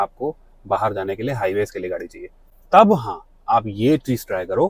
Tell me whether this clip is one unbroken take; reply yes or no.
yes